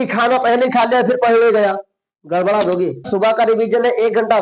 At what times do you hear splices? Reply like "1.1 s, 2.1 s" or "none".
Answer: 3.1 s